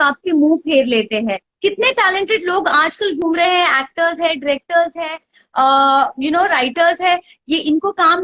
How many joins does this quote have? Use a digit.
1